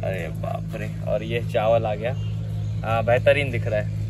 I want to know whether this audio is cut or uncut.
uncut